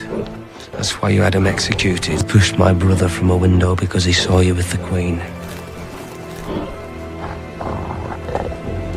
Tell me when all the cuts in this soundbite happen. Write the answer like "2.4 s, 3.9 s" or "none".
none